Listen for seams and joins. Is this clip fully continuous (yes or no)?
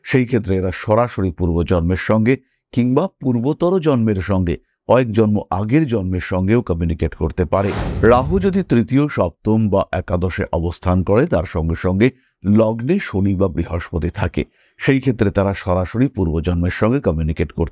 no